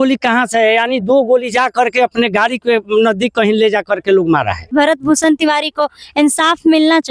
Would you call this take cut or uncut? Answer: cut